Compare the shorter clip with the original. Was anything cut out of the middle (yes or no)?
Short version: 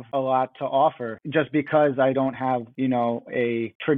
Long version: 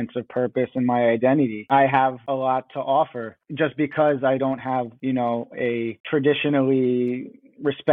yes